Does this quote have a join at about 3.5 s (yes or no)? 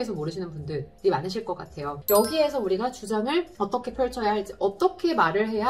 yes